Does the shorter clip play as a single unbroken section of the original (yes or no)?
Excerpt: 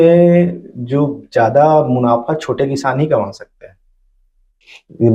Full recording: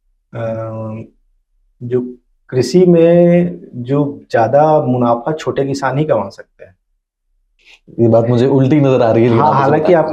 yes